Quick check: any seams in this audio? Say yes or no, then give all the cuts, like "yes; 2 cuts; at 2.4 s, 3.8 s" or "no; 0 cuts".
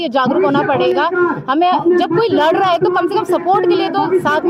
no; 0 cuts